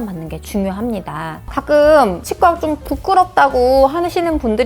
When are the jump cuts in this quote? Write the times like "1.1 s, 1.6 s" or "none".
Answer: 1.5 s

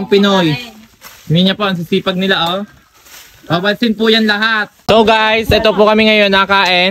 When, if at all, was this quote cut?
4.9 s

